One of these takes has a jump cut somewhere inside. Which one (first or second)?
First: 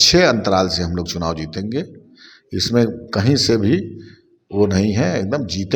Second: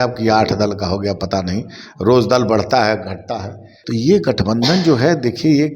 second